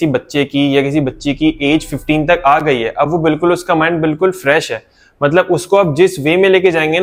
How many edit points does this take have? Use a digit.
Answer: 0